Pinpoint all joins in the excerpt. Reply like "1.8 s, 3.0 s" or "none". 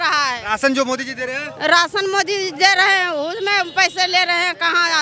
none